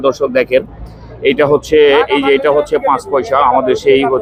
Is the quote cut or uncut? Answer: uncut